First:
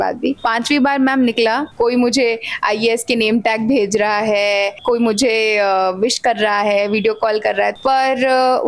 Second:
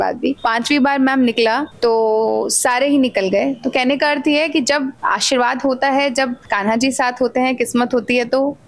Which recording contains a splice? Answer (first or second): first